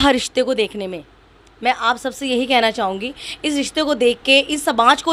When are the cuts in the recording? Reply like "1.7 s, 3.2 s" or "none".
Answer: none